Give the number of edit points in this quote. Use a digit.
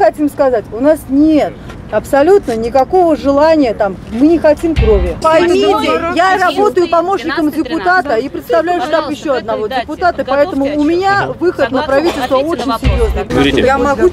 2